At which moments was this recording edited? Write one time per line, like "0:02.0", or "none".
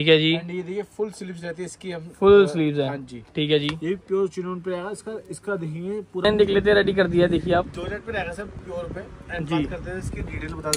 0:06.2